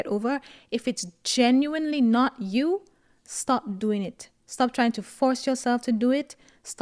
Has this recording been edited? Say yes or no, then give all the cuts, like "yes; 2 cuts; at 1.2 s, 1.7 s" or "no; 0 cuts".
no; 0 cuts